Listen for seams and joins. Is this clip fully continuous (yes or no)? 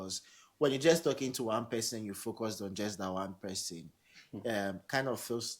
yes